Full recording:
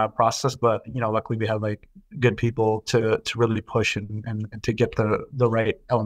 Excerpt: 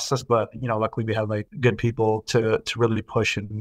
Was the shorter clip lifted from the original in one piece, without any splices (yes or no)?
no